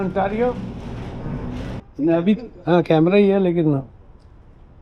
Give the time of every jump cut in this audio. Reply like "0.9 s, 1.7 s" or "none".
1.8 s